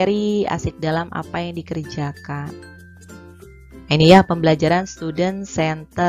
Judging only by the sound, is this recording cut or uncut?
uncut